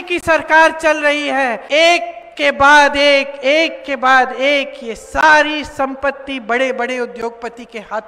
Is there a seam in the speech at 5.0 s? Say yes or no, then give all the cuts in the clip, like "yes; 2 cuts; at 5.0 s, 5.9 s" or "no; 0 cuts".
no; 1 cut; at 1.6 s